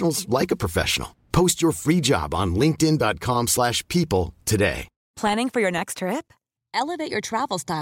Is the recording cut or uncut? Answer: cut